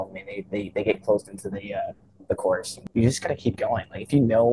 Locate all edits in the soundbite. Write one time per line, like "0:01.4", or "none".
0:02.8